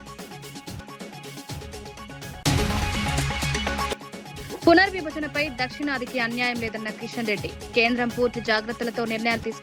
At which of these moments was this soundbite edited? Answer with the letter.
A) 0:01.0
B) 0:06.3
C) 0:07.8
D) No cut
A